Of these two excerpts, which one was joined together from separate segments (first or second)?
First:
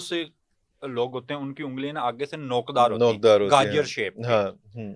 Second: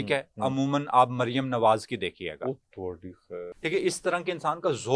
second